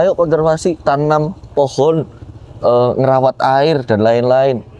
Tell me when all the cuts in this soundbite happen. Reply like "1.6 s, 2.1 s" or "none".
none